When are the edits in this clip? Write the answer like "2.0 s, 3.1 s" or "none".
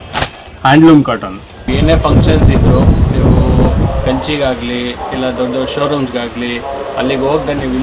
1.5 s